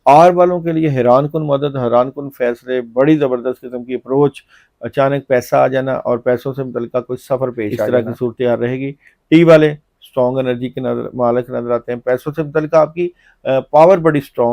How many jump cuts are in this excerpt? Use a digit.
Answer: 1